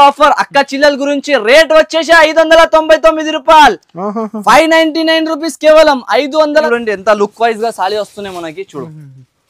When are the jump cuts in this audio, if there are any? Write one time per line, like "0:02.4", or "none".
0:06.7